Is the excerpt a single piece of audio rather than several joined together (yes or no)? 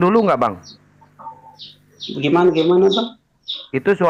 yes